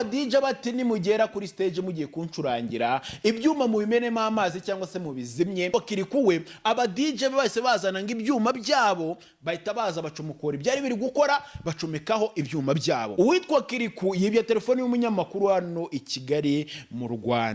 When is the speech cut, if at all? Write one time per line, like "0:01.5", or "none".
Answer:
0:05.7
0:13.1